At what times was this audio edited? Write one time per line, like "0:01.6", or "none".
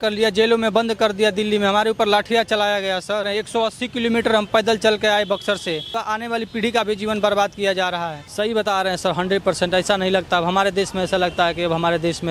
0:03.3
0:06.0
0:08.2

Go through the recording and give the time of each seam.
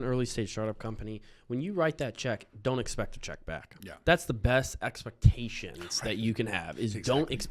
none

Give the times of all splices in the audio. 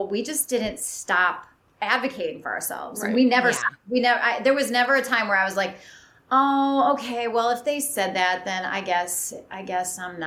none

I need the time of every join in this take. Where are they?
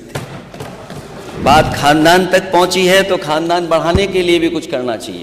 0:01.4

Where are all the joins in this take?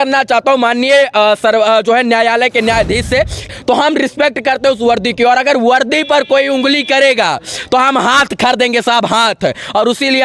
0:03.5

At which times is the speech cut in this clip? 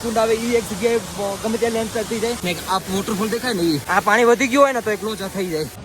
0:02.4
0:03.8

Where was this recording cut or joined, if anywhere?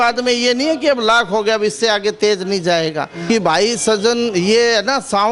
0:03.1

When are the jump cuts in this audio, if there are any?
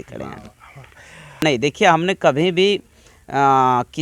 0:01.4

